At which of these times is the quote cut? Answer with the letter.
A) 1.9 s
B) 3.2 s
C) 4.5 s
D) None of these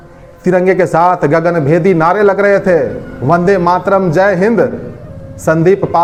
D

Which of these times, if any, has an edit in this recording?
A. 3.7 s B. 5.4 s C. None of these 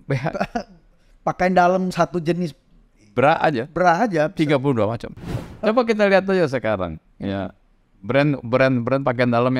B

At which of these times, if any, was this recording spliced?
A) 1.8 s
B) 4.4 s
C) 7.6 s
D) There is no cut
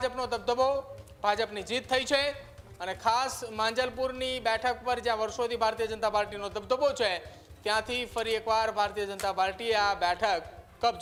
D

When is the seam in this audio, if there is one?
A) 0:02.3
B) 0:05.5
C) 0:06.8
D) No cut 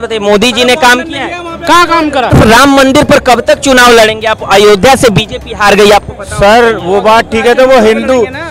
A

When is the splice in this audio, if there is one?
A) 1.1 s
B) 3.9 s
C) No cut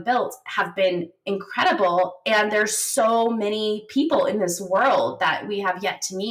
C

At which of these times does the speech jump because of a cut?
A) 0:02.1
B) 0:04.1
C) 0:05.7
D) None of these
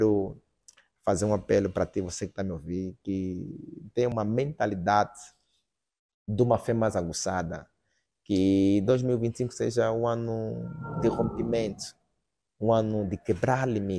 B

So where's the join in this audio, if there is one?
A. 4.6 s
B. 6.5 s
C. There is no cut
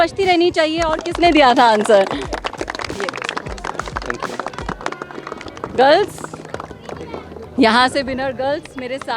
C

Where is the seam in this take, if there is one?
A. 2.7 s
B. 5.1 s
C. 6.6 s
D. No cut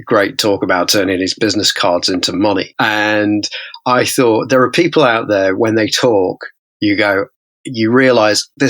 A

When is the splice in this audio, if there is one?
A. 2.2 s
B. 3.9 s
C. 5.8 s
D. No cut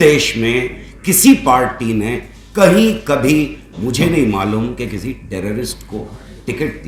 D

